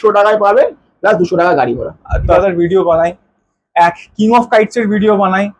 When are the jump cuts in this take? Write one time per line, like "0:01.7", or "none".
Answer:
0:02.0